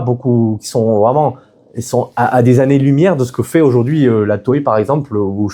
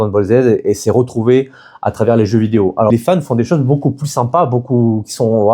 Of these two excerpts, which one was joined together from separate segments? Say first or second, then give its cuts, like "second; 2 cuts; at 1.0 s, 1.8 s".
second; 1 cut; at 2.9 s